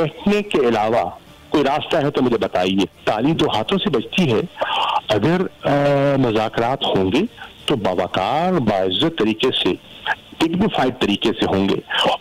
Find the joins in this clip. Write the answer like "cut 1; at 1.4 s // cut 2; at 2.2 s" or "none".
none